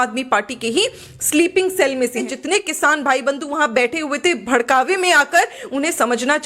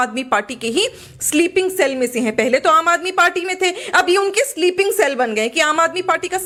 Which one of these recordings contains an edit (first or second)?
first